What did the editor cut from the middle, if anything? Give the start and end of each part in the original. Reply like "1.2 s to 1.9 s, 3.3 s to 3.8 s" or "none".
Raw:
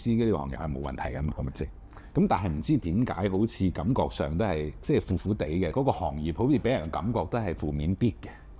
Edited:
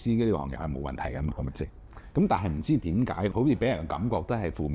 3.3 s to 6.3 s